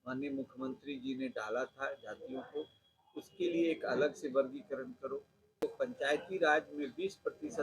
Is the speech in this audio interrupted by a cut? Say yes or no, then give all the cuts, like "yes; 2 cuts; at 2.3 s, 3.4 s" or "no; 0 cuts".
yes; 1 cut; at 5.6 s